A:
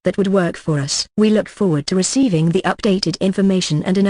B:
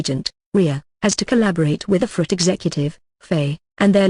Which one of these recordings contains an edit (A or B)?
A